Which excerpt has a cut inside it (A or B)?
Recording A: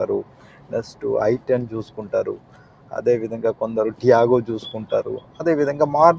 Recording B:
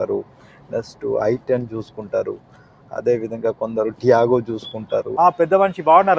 B